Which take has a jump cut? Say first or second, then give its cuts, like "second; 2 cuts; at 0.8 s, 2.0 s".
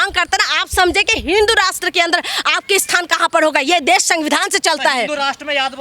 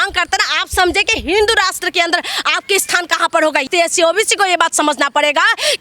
second; 1 cut; at 3.6 s